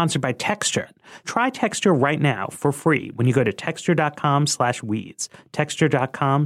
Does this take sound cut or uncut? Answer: cut